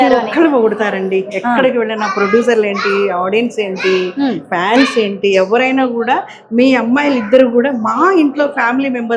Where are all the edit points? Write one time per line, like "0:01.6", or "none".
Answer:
none